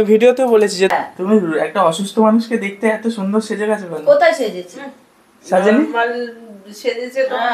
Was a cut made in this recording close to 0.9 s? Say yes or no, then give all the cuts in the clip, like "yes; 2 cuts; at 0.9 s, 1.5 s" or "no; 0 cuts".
yes; 1 cut; at 0.9 s